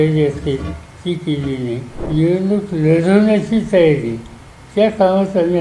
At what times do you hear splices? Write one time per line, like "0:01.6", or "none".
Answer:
0:01.9